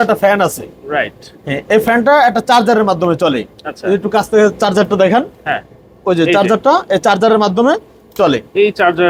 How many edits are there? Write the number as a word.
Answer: zero